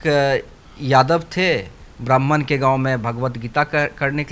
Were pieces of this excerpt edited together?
no; 0 cuts

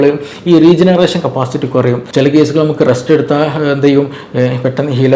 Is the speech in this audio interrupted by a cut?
yes; 1 cut; at 2.0 s

